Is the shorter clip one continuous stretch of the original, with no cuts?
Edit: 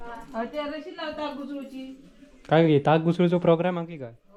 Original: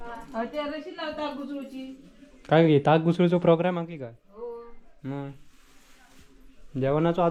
yes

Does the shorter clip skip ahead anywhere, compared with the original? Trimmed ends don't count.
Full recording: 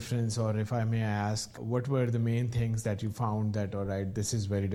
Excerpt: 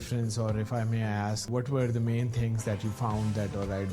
yes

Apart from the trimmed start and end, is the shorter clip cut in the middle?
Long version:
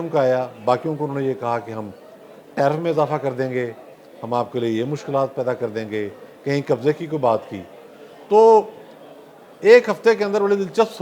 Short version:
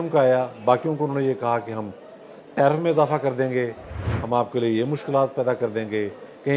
no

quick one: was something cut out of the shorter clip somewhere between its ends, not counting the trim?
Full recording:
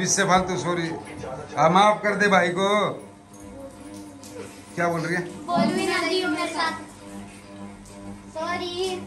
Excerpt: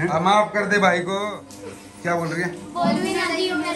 yes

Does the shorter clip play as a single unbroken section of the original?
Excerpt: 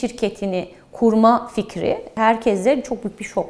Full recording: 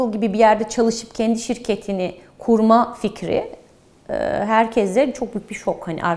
no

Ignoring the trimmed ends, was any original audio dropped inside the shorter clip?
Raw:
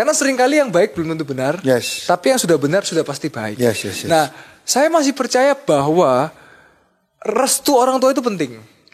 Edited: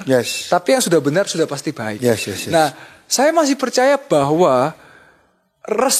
no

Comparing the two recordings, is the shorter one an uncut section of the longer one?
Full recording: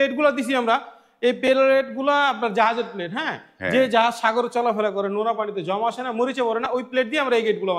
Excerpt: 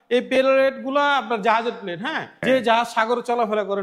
no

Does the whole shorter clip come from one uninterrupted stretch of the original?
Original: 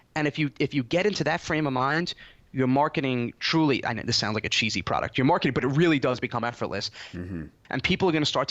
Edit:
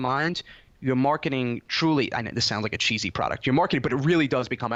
yes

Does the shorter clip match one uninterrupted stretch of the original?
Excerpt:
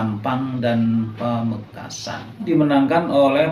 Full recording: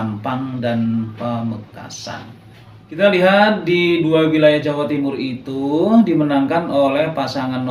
no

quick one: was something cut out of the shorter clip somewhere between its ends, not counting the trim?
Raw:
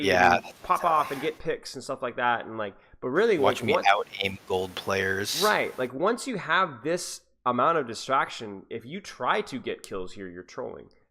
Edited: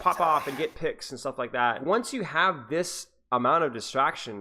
yes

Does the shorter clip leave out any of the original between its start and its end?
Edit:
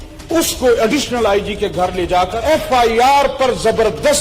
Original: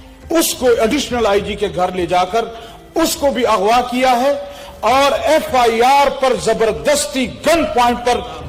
yes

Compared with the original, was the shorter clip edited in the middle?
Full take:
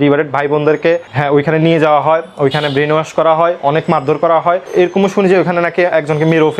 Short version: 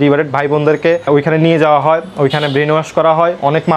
yes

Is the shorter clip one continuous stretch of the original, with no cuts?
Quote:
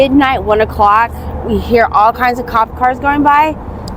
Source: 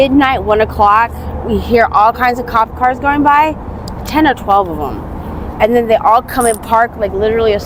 yes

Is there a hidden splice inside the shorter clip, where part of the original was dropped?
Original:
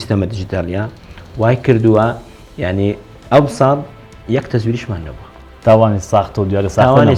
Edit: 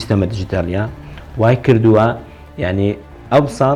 no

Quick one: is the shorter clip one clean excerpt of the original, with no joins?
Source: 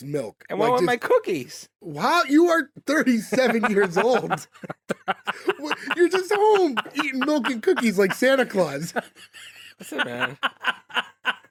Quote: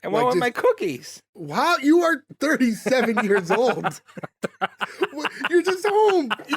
yes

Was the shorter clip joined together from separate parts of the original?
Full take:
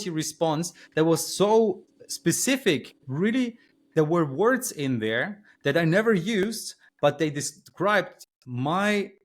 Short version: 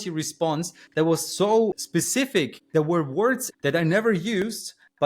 yes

